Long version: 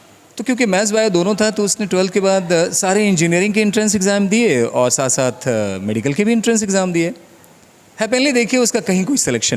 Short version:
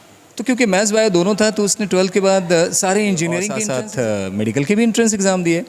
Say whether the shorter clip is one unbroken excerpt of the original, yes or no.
no